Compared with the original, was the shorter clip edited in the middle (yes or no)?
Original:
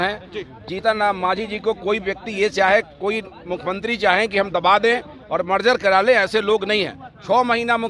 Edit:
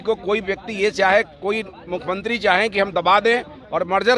no